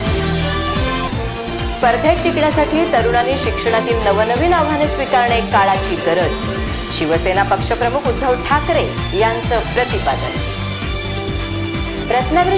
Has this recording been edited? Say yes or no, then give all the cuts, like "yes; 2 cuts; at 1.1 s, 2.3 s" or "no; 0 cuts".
yes; 1 cut; at 1.0 s